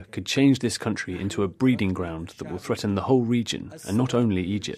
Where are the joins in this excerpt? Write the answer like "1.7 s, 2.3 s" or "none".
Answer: 2.6 s